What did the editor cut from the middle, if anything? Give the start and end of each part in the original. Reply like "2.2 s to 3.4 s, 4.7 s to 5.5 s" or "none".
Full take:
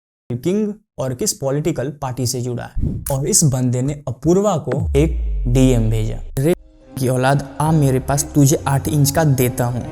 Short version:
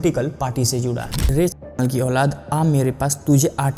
2.7 s to 6.2 s